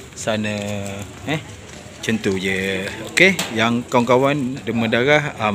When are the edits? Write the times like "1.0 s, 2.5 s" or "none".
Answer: 4.6 s